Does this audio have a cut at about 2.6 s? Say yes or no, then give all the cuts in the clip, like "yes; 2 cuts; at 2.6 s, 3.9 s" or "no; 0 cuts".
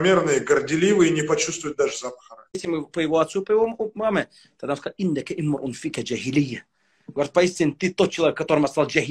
yes; 1 cut; at 2.6 s